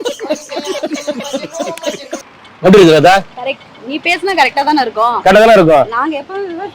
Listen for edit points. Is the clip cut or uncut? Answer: cut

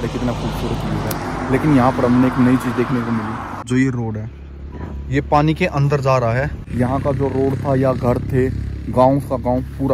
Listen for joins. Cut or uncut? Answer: cut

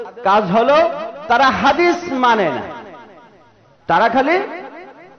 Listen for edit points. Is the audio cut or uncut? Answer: uncut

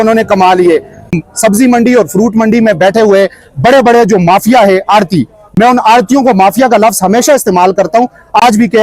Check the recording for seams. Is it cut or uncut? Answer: cut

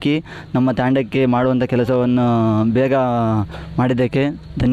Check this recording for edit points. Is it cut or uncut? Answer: uncut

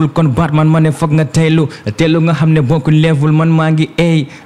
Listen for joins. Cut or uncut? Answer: uncut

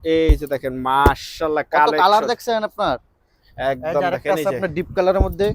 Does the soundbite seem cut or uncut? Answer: uncut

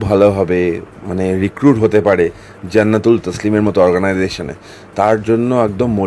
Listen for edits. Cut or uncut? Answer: uncut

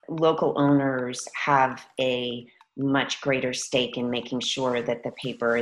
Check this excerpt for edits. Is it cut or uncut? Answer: uncut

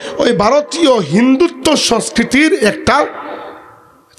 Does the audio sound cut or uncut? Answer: uncut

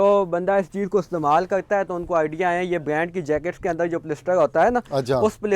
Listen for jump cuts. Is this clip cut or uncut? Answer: uncut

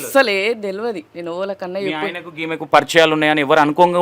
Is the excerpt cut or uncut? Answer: cut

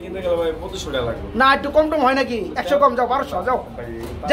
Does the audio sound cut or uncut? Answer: uncut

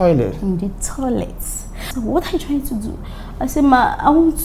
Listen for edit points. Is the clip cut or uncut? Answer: cut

